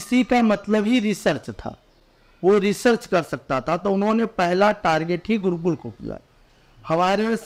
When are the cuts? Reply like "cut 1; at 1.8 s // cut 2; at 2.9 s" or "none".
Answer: none